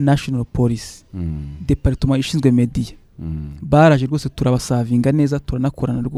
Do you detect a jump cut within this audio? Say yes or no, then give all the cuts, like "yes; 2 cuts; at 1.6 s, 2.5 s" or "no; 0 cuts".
no; 0 cuts